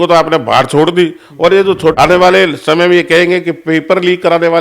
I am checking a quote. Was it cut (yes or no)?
yes